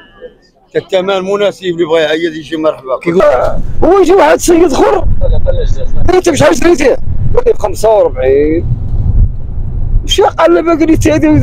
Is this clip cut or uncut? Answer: cut